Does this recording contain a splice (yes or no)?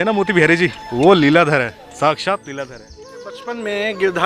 yes